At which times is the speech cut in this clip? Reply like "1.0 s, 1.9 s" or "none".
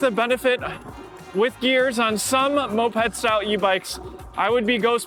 none